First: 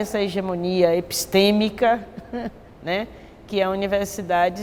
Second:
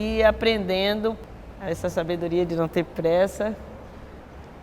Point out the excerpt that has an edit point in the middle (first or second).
second